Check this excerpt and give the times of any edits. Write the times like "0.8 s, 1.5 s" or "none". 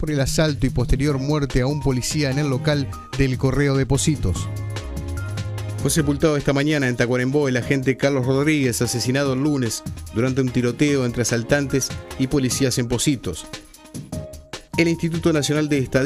12.8 s